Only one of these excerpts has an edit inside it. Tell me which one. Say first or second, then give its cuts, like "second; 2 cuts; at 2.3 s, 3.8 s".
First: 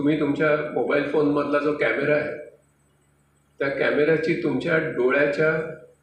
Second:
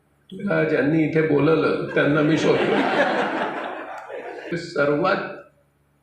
second; 1 cut; at 4.6 s